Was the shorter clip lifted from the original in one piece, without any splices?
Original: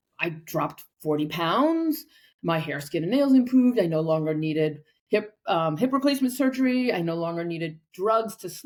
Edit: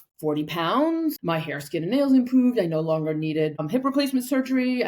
no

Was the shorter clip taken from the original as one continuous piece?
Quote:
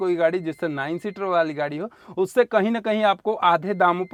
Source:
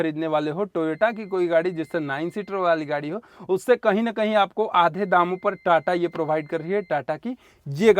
yes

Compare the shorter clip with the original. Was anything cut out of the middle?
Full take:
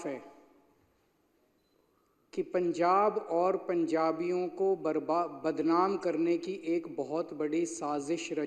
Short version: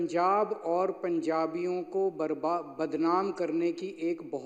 no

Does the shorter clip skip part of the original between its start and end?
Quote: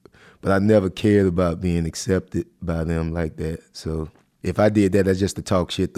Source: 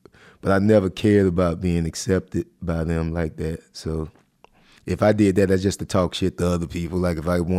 yes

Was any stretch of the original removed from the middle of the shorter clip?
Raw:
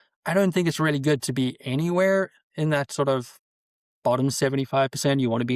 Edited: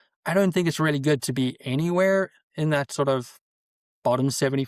no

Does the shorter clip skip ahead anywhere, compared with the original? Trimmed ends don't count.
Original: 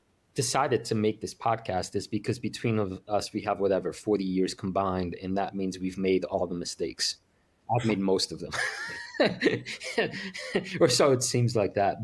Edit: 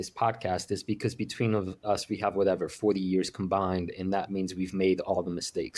no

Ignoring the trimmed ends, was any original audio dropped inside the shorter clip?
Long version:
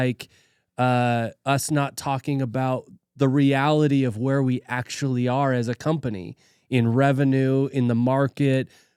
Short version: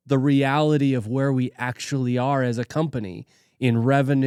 no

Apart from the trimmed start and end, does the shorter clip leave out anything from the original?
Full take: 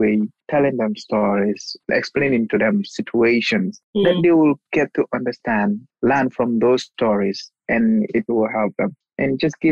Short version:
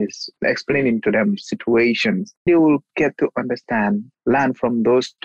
yes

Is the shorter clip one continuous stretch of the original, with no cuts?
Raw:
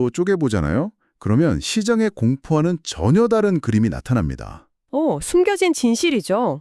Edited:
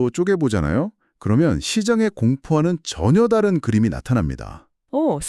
yes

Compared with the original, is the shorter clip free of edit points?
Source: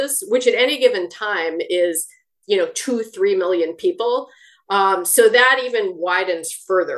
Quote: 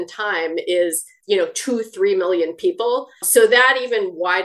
no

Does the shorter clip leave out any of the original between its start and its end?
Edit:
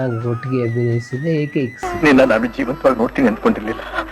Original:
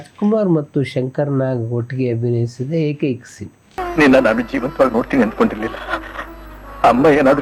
yes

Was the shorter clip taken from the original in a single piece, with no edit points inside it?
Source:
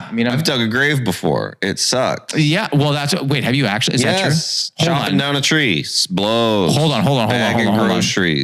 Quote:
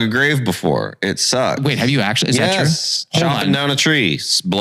no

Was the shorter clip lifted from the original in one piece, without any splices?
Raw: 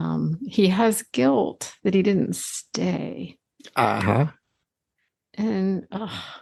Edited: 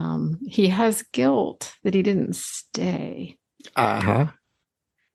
yes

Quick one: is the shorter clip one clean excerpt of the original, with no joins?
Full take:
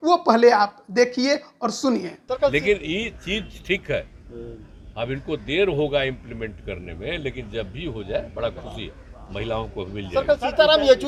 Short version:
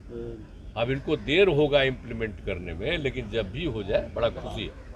yes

